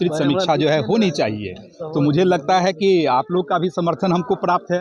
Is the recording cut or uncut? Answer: uncut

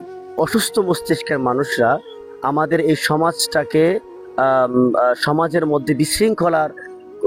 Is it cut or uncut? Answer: uncut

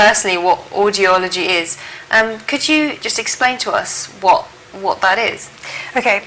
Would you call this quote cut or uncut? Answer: cut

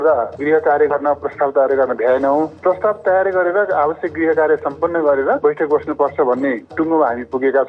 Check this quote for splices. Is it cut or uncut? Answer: cut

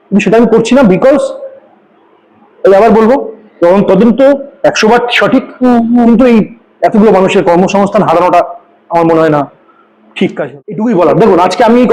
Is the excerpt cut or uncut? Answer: cut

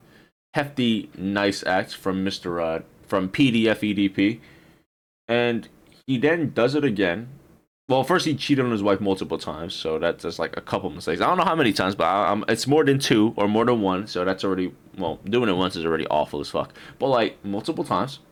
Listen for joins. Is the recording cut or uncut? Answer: uncut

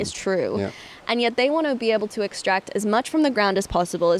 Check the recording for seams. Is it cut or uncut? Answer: uncut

